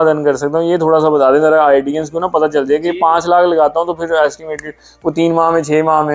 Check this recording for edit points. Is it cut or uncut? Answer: uncut